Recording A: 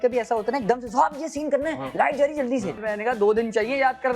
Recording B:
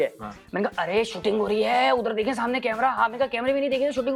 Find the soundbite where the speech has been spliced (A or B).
A